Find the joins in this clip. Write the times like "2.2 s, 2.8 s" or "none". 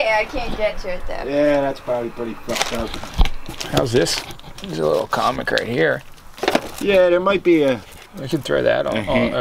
none